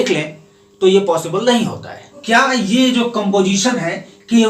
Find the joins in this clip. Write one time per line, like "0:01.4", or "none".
0:02.2